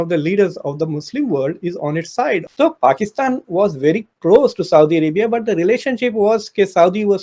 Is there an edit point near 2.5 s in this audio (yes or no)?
yes